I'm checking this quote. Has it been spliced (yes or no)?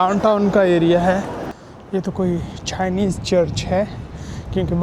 yes